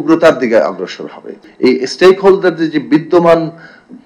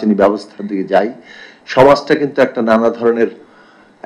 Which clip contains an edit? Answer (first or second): first